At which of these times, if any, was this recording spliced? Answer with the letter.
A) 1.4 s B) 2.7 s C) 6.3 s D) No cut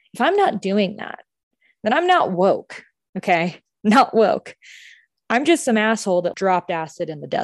C